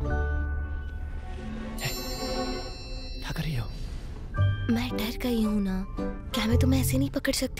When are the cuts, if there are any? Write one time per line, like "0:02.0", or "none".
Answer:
none